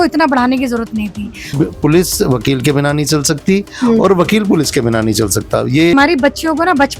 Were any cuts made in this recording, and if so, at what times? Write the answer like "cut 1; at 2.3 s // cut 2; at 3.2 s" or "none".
cut 1; at 1.5 s // cut 2; at 5.9 s

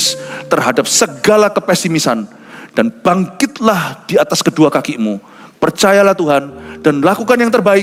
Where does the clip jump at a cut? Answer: none

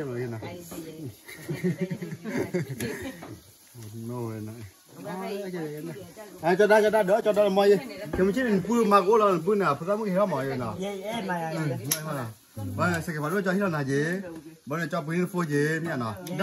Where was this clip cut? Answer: none

